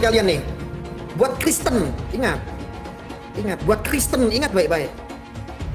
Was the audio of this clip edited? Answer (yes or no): no